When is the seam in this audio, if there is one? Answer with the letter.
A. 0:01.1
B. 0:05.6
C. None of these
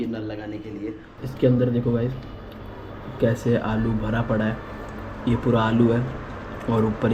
A